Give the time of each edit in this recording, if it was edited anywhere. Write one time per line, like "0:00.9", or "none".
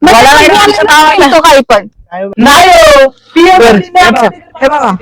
0:02.3